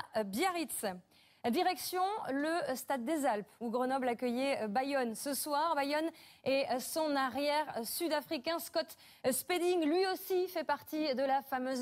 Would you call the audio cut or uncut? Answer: uncut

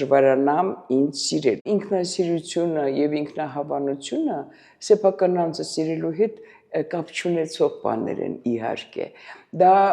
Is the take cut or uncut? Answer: cut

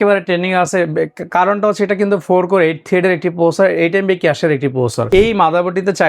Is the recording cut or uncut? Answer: cut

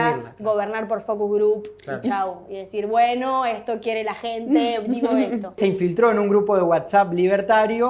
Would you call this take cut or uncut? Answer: cut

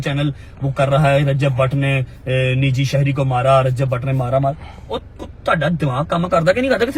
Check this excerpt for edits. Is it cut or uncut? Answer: uncut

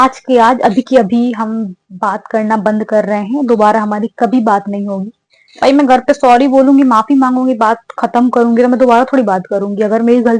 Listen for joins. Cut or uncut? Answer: uncut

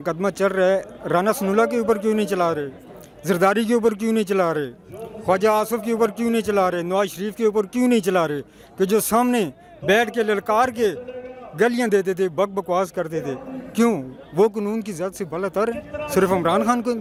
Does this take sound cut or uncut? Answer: uncut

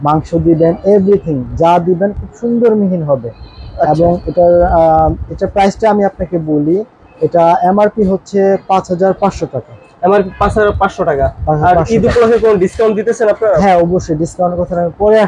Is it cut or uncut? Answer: uncut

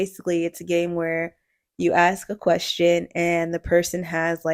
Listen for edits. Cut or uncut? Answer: uncut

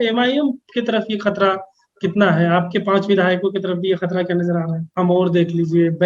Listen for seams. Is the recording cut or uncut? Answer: cut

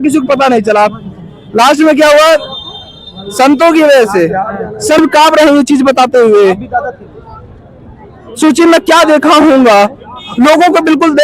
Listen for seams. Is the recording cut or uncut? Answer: cut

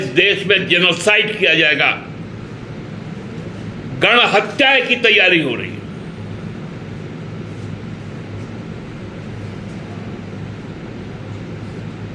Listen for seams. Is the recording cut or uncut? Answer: uncut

